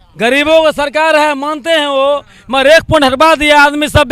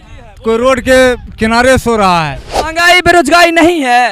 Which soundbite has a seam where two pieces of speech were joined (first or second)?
second